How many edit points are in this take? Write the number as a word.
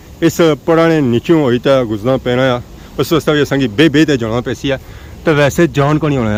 zero